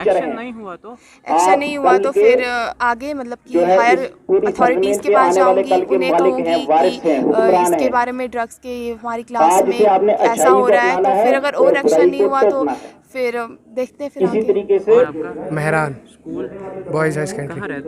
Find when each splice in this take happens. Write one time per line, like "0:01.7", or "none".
none